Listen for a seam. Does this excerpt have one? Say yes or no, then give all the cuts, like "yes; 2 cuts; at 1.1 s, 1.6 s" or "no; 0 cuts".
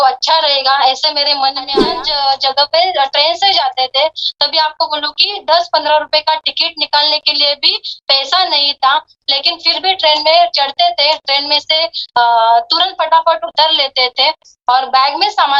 yes; 1 cut; at 1.7 s